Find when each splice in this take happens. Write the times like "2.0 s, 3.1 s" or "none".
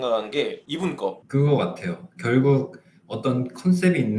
1.2 s